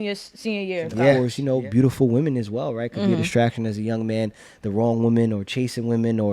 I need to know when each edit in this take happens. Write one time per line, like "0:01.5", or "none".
0:01.2